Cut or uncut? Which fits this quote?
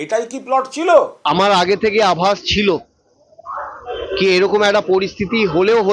cut